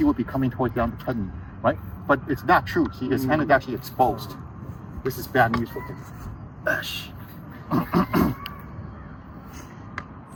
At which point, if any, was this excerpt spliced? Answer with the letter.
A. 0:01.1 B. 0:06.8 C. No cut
C